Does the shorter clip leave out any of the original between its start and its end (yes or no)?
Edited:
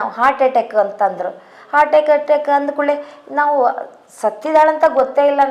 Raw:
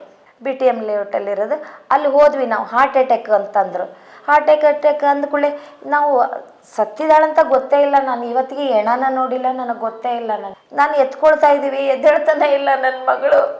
no